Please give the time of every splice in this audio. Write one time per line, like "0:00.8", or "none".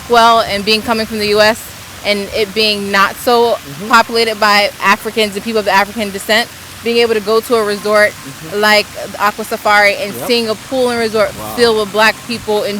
none